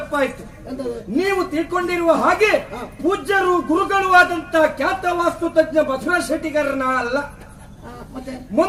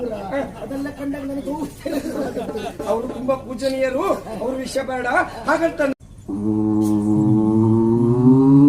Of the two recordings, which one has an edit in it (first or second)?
second